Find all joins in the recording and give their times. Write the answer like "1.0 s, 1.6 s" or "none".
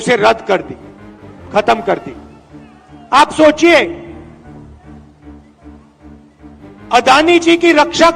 4.1 s, 6.9 s